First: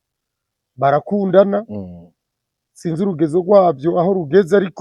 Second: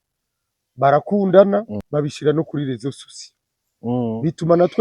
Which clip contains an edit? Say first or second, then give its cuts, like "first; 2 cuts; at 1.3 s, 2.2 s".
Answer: second; 1 cut; at 1.8 s